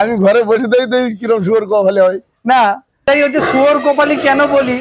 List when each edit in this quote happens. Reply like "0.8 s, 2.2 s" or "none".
3.1 s